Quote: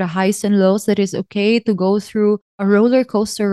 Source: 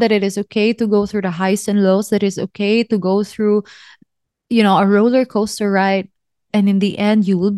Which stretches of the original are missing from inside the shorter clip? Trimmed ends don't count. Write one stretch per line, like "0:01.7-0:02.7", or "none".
0:03.9-0:04.8